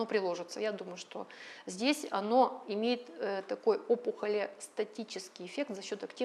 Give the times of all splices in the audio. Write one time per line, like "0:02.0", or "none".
none